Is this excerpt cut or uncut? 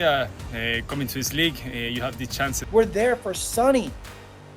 cut